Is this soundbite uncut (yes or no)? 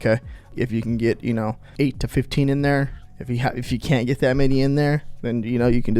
no